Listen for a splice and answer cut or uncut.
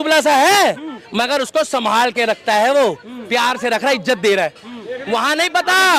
uncut